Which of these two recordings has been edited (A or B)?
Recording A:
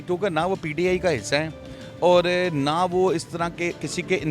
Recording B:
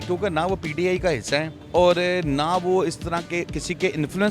B